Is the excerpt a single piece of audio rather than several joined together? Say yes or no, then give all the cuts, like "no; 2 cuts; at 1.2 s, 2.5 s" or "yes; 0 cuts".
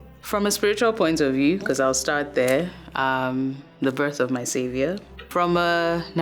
no; 1 cut; at 5.3 s